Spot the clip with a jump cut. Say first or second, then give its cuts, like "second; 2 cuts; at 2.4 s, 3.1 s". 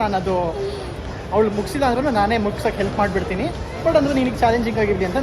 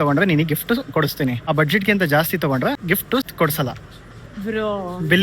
second; 2 cuts; at 1.4 s, 3.0 s